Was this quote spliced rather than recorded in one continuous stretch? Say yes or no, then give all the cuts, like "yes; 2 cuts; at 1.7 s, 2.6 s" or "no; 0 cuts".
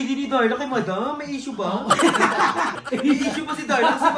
yes; 1 cut; at 2.8 s